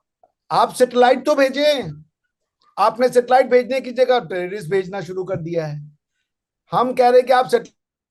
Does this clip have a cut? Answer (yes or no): no